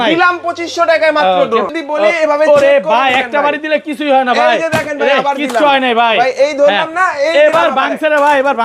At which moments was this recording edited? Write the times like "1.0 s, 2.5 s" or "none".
1.7 s